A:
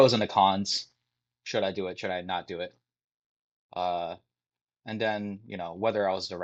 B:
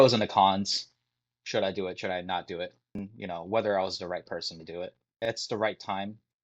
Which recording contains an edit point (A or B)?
B